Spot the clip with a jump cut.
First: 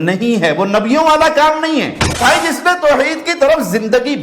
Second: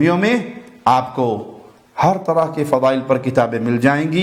first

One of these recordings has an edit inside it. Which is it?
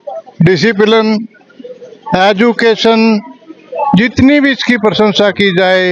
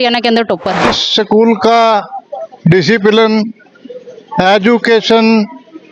second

